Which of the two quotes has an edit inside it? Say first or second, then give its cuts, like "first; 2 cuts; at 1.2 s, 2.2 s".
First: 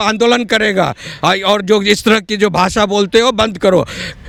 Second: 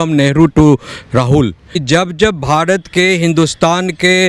second; 1 cut; at 1.8 s